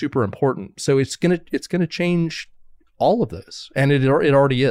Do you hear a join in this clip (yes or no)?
no